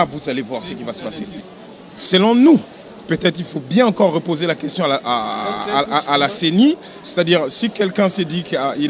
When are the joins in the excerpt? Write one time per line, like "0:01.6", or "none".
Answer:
0:01.4